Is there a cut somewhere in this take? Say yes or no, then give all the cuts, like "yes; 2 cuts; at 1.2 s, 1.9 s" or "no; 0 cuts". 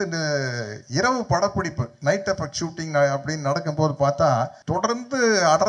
yes; 1 cut; at 4.6 s